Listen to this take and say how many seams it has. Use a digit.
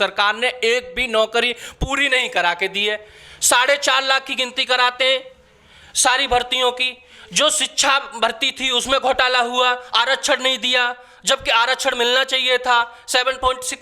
0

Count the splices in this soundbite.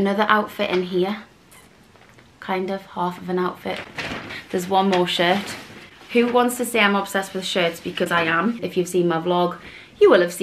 2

